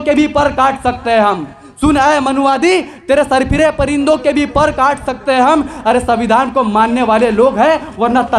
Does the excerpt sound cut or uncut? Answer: uncut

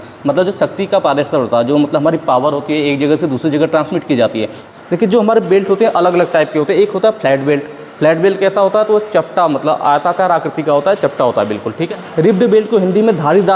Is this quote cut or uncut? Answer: cut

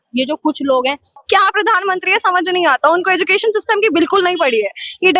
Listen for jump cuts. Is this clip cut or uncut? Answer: cut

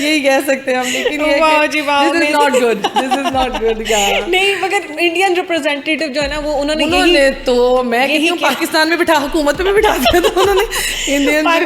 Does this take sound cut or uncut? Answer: uncut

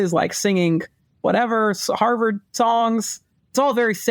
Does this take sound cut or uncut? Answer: uncut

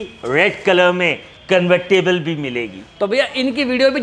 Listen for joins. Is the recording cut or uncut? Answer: uncut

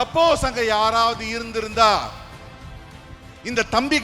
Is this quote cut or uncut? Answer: uncut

